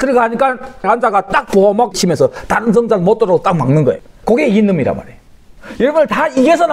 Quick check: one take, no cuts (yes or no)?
no